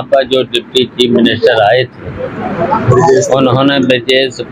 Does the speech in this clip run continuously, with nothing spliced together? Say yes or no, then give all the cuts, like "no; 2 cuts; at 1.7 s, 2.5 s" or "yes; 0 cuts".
yes; 0 cuts